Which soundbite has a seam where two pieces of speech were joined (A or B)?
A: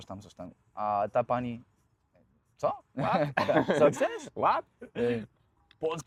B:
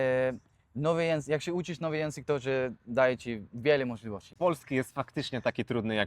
B